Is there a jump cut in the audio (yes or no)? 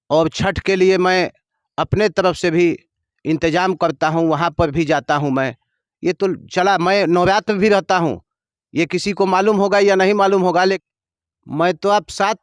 yes